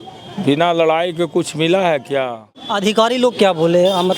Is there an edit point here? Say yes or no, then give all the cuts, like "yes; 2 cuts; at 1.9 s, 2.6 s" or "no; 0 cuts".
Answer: yes; 1 cut; at 2.8 s